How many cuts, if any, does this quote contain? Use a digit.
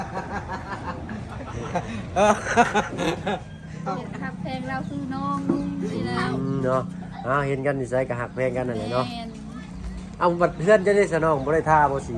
1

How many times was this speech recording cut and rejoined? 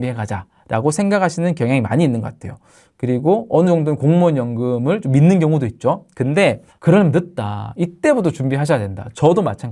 0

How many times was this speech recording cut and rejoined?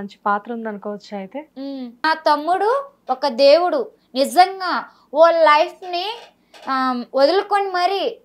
1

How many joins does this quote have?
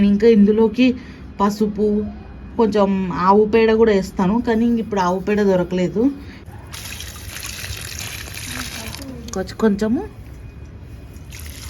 1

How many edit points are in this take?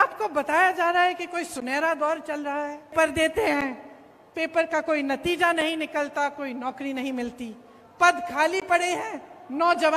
1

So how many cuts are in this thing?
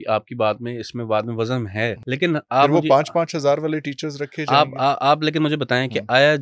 1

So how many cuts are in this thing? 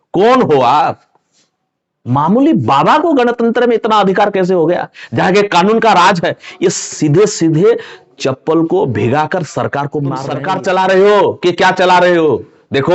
1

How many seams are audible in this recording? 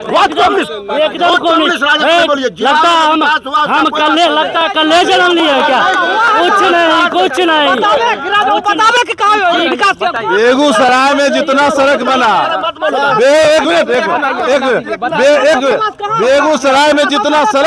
0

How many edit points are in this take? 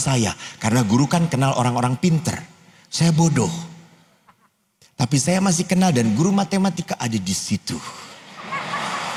0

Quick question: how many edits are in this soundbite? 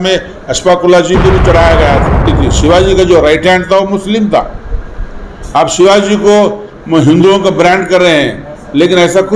1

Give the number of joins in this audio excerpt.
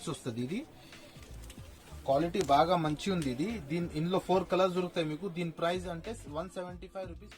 0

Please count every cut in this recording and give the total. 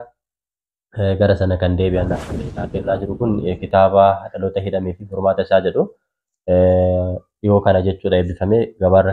1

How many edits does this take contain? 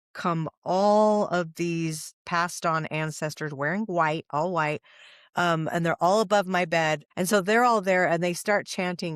1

